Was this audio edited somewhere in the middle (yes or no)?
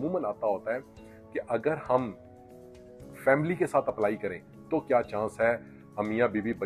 no